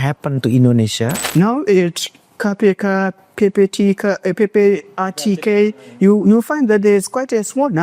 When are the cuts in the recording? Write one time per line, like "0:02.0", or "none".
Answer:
0:01.2